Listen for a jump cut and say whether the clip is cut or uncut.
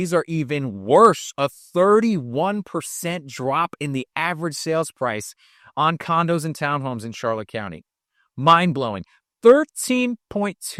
uncut